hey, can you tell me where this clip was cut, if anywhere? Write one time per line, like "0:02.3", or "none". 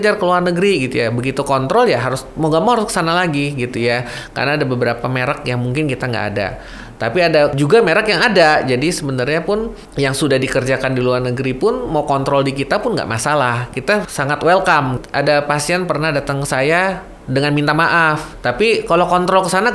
0:07.5
0:09.8
0:13.8
0:15.0
0:18.3